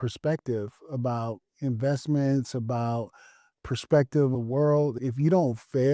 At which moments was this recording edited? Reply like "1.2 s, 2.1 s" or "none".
3.4 s, 4.7 s